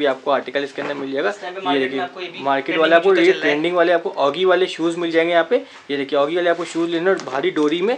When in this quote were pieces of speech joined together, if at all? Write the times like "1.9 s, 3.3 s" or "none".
none